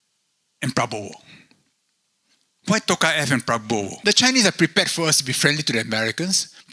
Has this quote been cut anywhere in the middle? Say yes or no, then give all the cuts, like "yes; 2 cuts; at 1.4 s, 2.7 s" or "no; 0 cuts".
yes; 1 cut; at 3.9 s